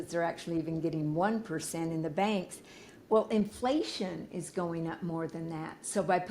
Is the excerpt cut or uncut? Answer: uncut